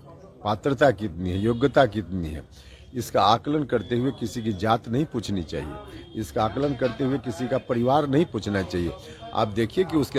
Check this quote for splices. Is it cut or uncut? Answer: uncut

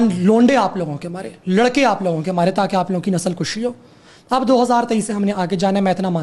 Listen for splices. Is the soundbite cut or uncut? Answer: uncut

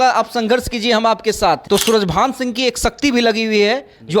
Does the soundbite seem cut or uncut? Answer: cut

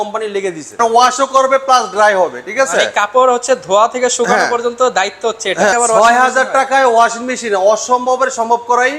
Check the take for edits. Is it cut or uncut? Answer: cut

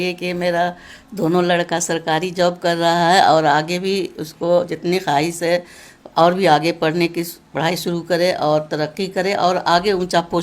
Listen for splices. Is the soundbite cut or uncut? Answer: uncut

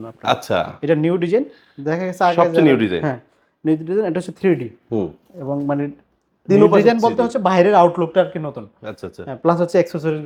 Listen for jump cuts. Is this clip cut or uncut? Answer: uncut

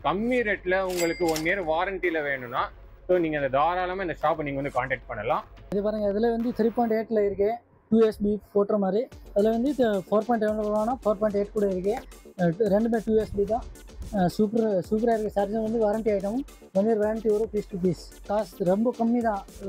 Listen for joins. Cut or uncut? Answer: uncut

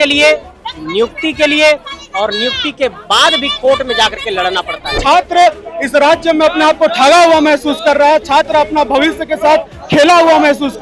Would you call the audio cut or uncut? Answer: cut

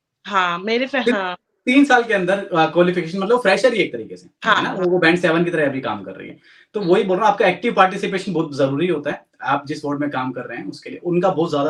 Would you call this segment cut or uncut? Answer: uncut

